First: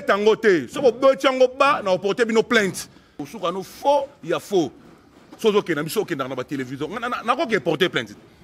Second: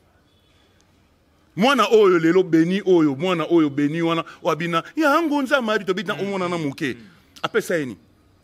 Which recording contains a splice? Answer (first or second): first